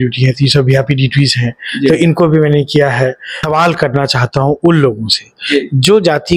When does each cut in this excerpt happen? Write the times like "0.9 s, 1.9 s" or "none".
3.4 s